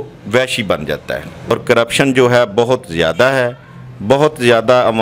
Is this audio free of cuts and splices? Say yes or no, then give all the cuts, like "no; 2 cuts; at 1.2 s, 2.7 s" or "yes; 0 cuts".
no; 1 cut; at 1.5 s